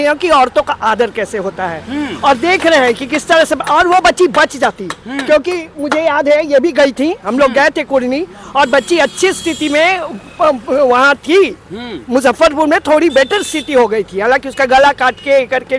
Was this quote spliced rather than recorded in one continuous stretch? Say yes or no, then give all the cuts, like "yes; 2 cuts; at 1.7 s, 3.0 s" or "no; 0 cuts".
no; 0 cuts